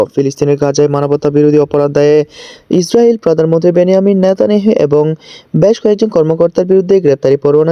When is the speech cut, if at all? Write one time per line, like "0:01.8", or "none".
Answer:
none